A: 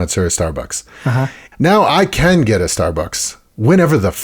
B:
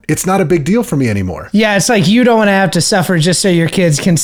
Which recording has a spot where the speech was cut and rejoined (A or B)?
A